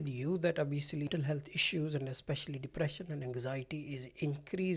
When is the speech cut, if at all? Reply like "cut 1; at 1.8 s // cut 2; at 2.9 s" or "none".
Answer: cut 1; at 1.1 s